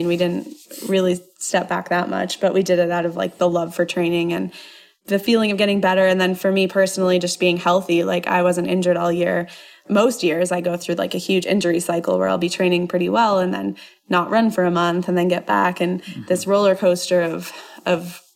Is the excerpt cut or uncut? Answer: cut